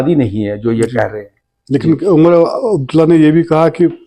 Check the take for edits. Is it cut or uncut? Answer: uncut